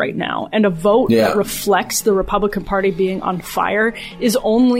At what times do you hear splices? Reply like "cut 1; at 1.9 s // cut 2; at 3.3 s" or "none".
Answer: none